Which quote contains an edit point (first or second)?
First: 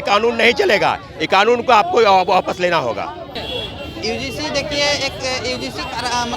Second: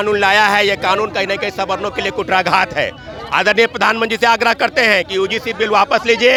first